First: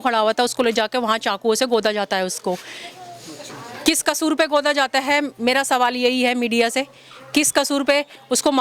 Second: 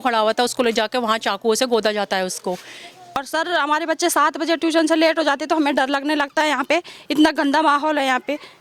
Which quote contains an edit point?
second; 1 cut; at 3.2 s

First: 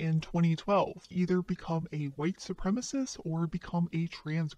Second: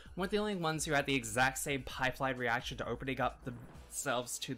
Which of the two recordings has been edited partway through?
first; 1 cut; at 1.0 s

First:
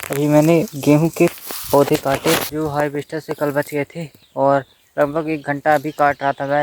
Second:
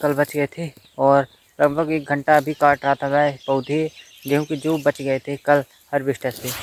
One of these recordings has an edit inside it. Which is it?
first; 1 cut; at 2.5 s

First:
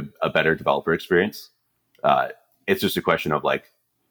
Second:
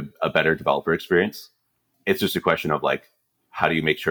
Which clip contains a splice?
second; 1 cut; at 1.8 s

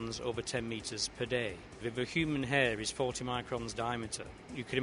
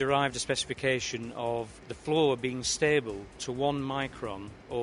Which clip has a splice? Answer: first; 1 cut; at 1.8 s

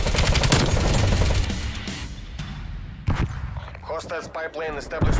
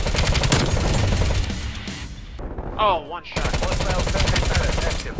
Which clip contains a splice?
second; 1 cut; at 2.4 s

